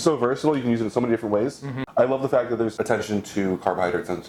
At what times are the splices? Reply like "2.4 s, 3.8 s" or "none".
1.7 s, 2.7 s